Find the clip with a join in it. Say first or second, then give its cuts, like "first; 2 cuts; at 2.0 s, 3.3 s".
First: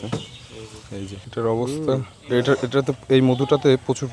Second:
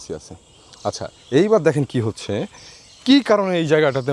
first; 1 cut; at 1.1 s